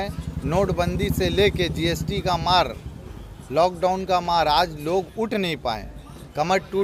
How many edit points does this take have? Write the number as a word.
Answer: zero